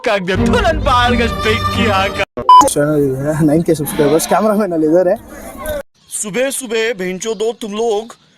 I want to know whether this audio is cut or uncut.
cut